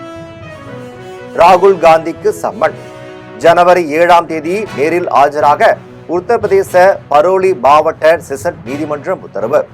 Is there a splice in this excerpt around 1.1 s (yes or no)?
yes